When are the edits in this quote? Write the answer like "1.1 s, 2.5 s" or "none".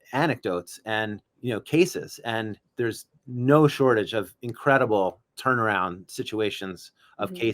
1.3 s, 2.6 s